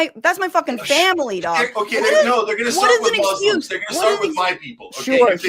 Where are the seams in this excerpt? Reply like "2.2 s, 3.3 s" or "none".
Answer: 1.7 s